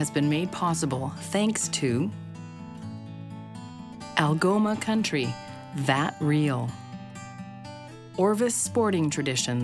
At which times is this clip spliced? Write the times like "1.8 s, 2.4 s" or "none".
none